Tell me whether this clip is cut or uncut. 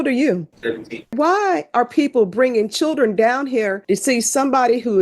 cut